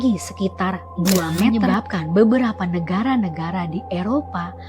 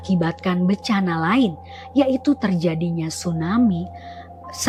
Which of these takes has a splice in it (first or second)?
first